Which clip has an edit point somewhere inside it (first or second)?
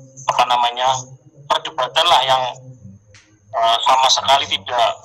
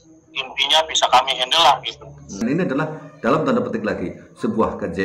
second